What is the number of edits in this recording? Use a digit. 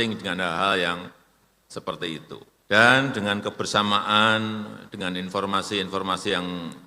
1